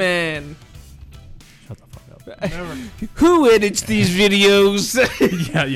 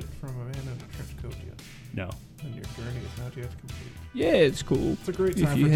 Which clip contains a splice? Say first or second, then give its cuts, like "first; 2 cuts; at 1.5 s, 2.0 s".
second; 1 cut; at 4.0 s